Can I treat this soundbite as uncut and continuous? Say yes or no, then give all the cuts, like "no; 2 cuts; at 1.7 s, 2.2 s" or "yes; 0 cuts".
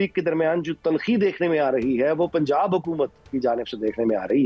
yes; 0 cuts